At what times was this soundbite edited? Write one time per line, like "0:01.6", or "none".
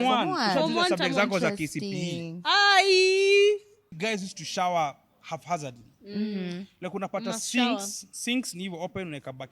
0:03.9